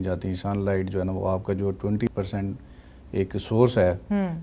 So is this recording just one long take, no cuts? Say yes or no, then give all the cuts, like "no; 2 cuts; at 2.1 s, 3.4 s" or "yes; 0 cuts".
no; 1 cut; at 2.1 s